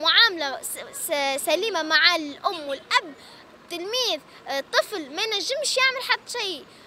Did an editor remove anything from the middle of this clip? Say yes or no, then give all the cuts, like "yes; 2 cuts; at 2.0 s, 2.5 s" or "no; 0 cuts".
no; 0 cuts